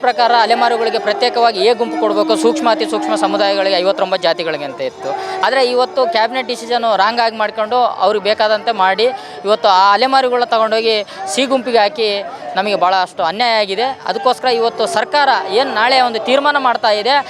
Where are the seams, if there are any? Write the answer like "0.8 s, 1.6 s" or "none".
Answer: none